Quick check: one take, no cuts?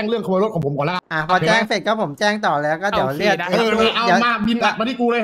no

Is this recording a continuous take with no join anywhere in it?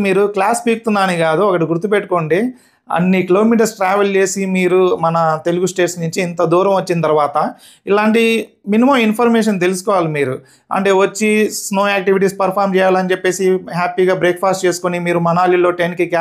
yes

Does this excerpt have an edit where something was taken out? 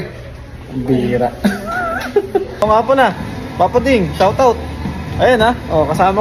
yes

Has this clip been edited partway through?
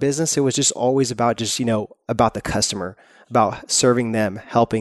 no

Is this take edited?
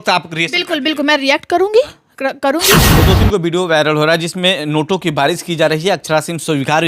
yes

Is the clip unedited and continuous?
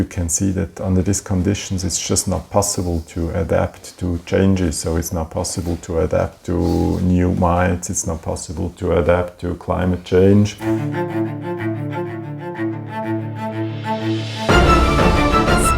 no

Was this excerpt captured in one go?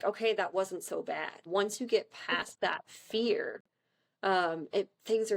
no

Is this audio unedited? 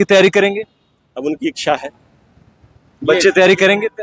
yes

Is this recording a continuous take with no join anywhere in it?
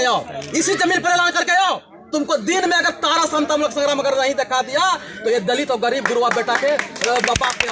yes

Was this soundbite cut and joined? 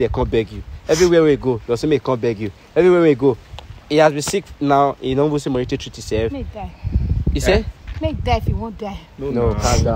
no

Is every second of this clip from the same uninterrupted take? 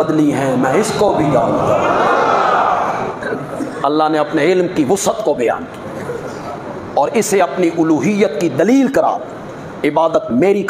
yes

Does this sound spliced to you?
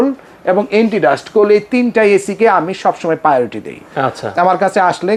no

